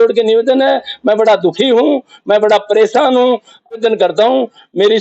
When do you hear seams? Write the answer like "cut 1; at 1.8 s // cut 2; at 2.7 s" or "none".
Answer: cut 1; at 3.8 s